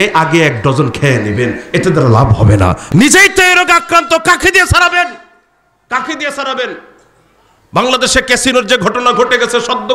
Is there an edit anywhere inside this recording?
yes; 1 cut; at 2.8 s

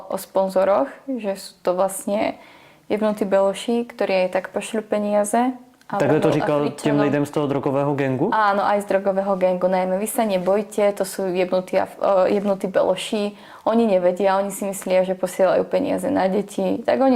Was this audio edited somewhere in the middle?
no; 0 cuts

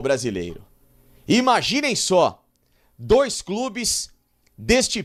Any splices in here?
no; 0 cuts

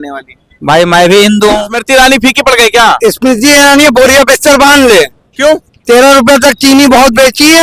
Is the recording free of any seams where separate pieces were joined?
no; 1 cut; at 1.8 s

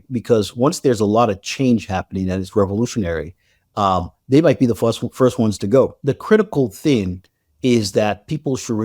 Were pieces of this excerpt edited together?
yes; 1 cut; at 6.0 s

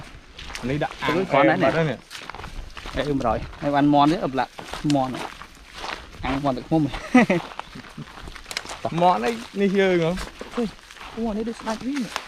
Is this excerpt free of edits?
yes; 0 cuts

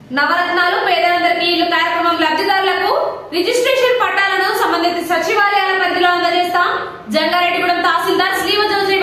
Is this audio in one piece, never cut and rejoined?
yes; 0 cuts

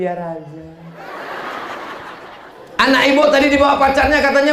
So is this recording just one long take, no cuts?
no; 1 cut; at 2.5 s

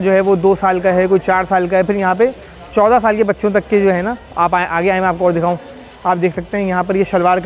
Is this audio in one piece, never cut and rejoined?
yes; 0 cuts

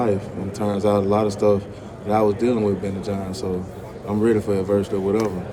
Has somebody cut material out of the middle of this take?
no; 0 cuts

